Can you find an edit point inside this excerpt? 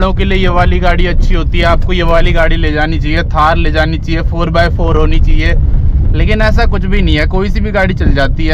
no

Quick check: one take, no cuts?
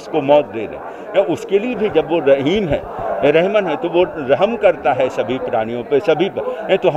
yes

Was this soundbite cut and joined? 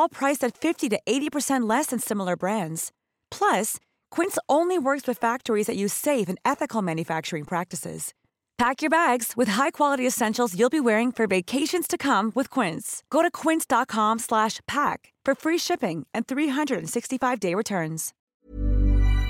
yes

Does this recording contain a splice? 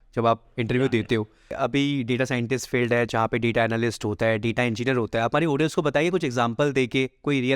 yes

